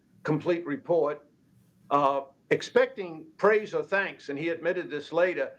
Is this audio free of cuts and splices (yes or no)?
yes